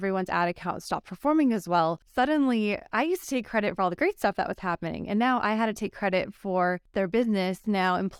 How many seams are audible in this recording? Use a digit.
2